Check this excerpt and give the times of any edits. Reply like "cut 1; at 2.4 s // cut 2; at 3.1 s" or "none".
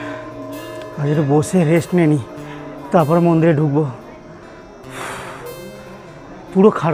none